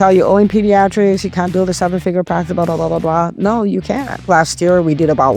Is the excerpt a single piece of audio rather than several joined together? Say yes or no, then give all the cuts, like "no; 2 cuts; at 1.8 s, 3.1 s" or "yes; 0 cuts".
no; 2 cuts; at 1.5 s, 4.2 s